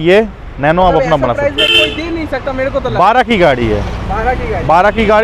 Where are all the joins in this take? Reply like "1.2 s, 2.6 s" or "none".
none